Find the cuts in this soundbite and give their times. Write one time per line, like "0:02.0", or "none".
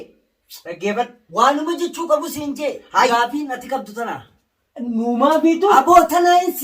0:03.1